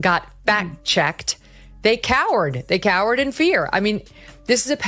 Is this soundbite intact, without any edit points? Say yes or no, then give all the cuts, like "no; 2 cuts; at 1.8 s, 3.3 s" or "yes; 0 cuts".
yes; 0 cuts